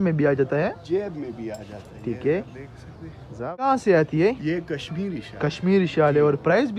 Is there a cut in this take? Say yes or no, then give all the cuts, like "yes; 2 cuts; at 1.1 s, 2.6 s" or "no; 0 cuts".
no; 0 cuts